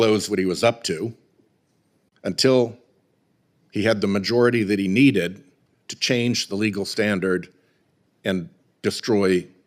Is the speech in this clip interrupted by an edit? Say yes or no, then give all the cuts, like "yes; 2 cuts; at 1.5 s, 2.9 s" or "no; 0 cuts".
no; 0 cuts